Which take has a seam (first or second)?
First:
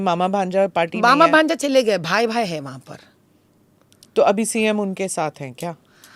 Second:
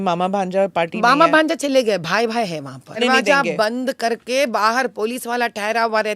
second